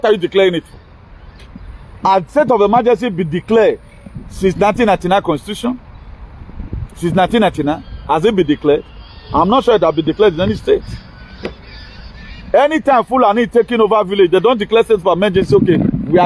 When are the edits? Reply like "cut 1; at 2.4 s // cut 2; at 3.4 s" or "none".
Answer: none